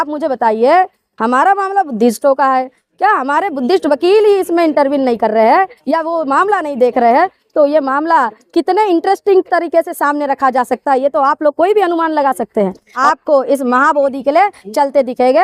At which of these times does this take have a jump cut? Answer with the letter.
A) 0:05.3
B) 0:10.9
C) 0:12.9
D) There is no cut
C